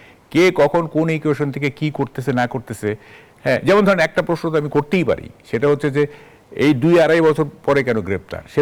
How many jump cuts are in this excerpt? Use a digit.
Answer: 0